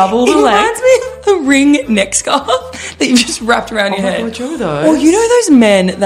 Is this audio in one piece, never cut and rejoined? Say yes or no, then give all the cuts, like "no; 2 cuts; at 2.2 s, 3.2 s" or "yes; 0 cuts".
yes; 0 cuts